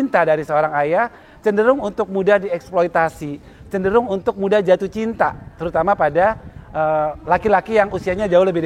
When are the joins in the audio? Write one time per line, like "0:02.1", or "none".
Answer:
none